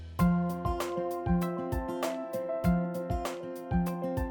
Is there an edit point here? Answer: no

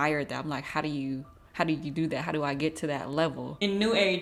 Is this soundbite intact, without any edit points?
yes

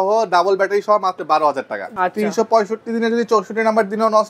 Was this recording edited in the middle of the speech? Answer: yes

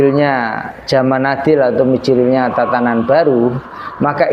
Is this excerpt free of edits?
yes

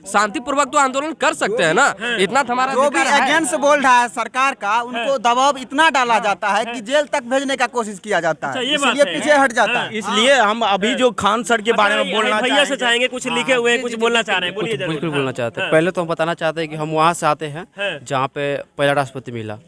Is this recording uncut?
yes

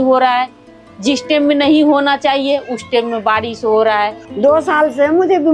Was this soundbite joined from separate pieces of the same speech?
yes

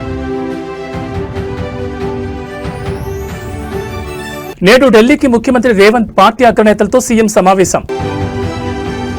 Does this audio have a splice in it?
no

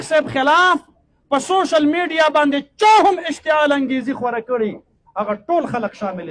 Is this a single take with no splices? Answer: yes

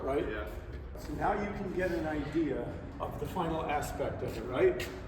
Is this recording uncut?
yes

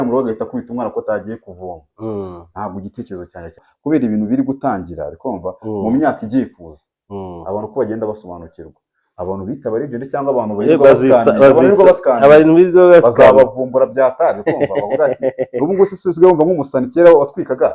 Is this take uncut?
no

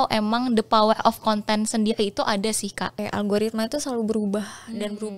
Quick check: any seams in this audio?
yes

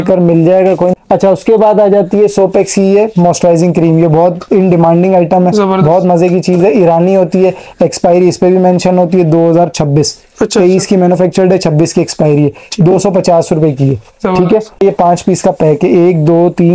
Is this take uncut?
no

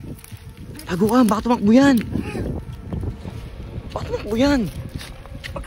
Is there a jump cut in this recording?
no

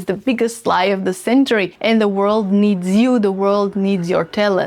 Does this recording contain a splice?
yes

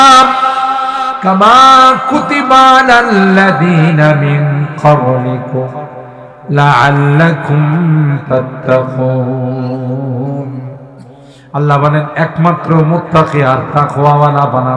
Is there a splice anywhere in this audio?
no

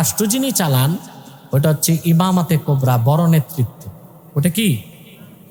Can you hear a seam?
no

